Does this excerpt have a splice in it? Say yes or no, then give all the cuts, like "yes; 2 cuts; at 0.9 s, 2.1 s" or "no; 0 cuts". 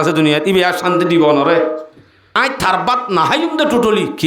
yes; 1 cut; at 2.4 s